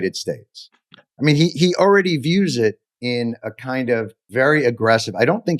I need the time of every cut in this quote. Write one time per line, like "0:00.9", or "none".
0:02.9
0:04.2